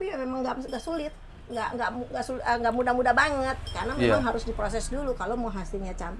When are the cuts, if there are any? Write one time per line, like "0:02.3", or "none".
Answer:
none